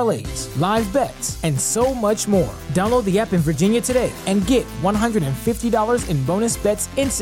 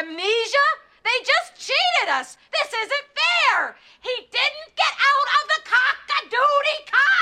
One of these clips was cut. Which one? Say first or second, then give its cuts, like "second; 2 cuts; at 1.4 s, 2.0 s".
second; 1 cut; at 3.8 s